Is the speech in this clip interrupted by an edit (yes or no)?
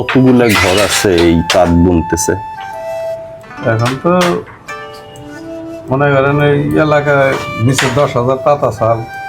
yes